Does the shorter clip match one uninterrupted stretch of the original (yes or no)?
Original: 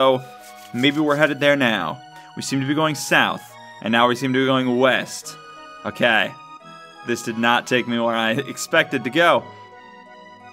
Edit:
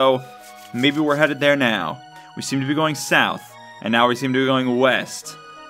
yes